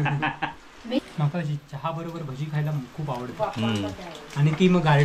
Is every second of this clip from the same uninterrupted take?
no; 1 cut; at 1.1 s

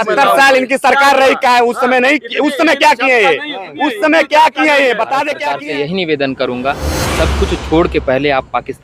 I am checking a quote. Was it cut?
yes; 1 cut; at 5.4 s

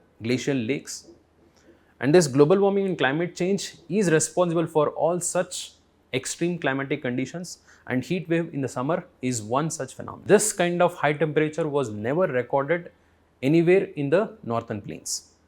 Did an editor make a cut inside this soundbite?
yes; 1 cut; at 10.2 s

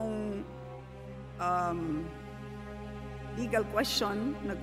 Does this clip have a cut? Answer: yes; 2 cuts; at 2.1 s, 3.4 s

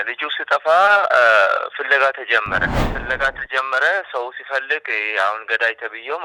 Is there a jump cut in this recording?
yes; 1 cut; at 2.9 s

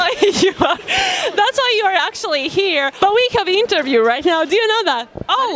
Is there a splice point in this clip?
no; 0 cuts

